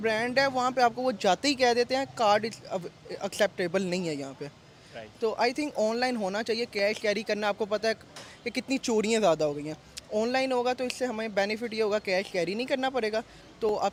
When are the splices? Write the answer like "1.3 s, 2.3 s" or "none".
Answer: none